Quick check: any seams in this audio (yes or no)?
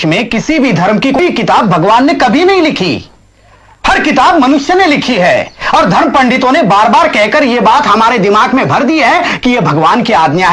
yes